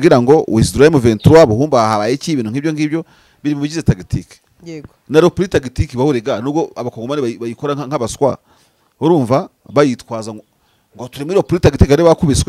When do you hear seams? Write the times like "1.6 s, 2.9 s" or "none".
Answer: none